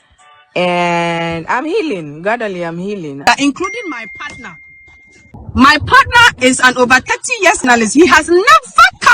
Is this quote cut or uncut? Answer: cut